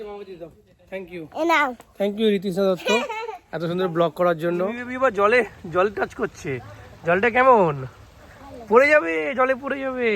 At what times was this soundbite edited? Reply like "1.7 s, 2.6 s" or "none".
4.7 s